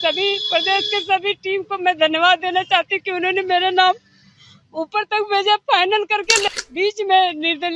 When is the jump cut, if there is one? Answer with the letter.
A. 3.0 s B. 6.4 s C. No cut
B